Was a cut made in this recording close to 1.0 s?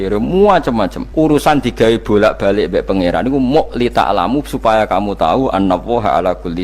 yes; 1 cut; at 1.0 s

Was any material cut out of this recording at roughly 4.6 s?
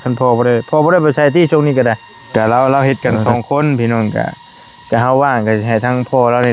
no; 1 cut; at 2.1 s

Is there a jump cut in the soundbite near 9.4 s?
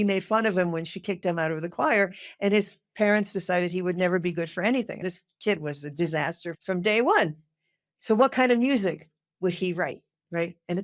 no; 0 cuts

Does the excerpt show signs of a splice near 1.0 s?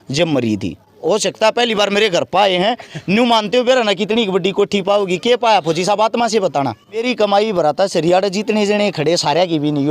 yes; 2 cuts; at 1.0 s, 7.0 s

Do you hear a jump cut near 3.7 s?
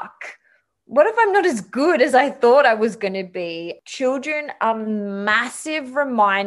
yes; 1 cut; at 3.7 s

